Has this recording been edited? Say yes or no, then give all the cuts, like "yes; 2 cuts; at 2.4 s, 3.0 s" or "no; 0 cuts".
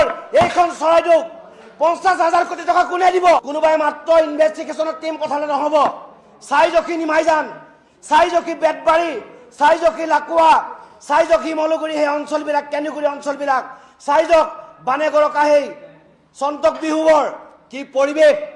yes; 1 cut; at 3.4 s